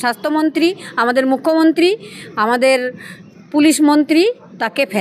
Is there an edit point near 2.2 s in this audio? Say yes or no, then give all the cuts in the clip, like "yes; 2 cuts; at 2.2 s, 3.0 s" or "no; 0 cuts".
no; 0 cuts